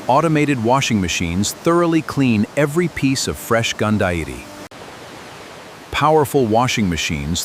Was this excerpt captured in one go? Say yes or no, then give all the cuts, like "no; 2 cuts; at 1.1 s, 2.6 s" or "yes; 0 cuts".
yes; 0 cuts